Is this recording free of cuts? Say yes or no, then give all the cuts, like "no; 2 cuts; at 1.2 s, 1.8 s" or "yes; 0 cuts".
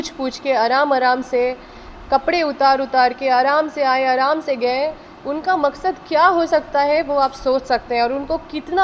yes; 0 cuts